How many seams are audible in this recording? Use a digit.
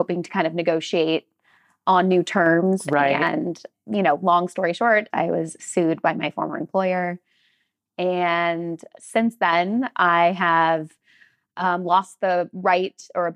2